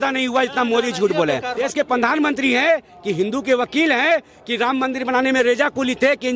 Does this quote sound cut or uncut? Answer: cut